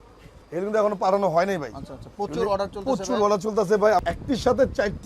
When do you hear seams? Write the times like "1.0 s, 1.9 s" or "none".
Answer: 4.0 s